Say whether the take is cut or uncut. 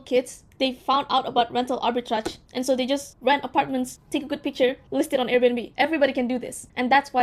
uncut